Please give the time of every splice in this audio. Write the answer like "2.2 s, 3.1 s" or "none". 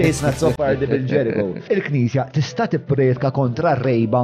1.6 s